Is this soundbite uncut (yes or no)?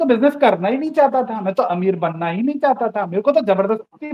yes